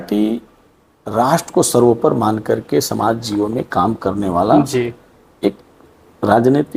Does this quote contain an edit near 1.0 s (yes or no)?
no